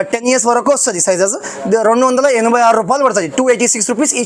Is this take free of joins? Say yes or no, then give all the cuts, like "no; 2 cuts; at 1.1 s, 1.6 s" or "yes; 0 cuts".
yes; 0 cuts